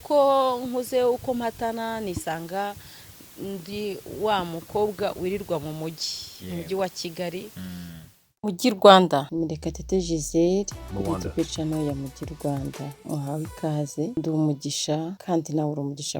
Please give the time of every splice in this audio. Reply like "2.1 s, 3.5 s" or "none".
8.4 s